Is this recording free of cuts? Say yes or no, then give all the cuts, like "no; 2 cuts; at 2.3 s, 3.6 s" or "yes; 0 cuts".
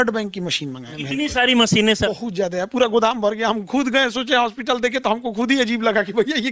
no; 2 cuts; at 0.9 s, 2.1 s